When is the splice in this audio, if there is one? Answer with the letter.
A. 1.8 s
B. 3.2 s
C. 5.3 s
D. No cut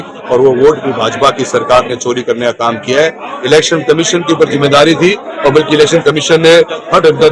D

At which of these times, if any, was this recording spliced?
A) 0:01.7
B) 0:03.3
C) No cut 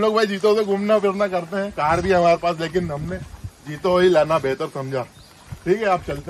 C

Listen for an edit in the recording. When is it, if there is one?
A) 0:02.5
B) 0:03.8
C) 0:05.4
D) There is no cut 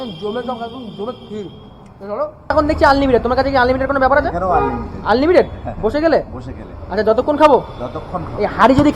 A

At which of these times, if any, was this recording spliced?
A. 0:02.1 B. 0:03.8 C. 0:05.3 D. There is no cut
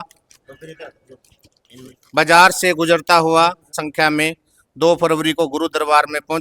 B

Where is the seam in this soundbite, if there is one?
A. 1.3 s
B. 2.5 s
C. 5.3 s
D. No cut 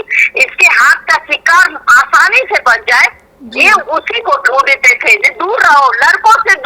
C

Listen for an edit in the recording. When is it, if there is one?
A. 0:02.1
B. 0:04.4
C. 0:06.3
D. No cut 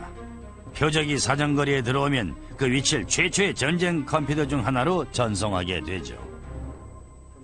A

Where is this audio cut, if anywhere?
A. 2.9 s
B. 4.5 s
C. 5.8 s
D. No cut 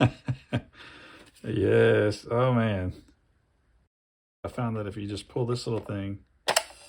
B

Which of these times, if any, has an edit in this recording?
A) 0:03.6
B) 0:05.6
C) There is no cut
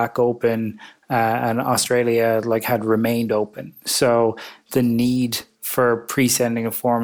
C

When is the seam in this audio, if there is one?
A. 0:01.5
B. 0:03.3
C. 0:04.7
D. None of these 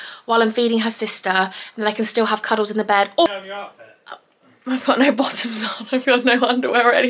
B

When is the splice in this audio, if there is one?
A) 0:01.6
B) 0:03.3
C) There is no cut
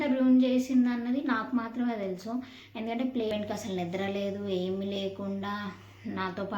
B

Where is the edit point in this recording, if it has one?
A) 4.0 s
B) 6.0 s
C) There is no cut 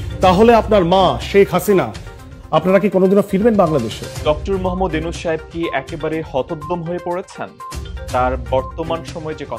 A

